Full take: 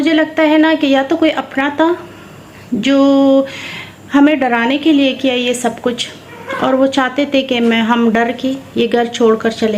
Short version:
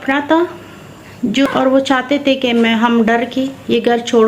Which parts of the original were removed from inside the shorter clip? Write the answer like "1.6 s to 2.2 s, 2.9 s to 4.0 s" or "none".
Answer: 2.9 s to 6.5 s